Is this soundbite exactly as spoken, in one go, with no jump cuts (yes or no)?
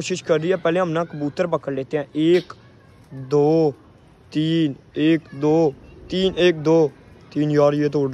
yes